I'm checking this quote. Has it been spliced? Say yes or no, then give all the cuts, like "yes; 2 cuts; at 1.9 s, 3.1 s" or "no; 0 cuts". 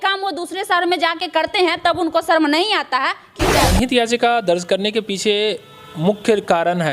yes; 1 cut; at 3.6 s